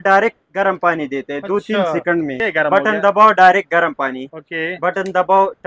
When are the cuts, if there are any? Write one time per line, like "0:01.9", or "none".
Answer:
0:02.4